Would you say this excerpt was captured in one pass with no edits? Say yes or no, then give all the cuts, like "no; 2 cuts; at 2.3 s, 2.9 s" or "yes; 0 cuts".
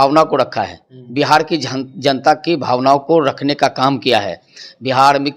yes; 0 cuts